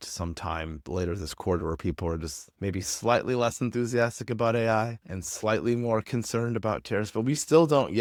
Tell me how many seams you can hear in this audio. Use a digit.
0